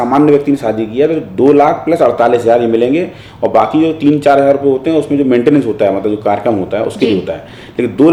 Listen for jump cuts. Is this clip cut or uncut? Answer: uncut